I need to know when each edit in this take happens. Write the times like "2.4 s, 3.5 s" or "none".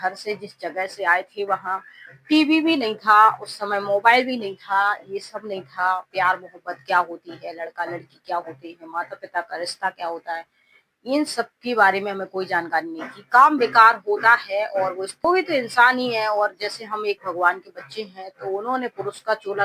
15.2 s